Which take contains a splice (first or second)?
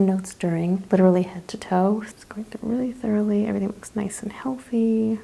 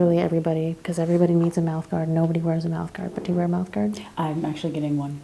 first